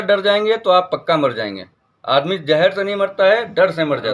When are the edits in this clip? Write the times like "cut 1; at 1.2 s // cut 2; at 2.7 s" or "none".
none